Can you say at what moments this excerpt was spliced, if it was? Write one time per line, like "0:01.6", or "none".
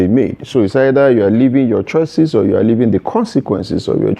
none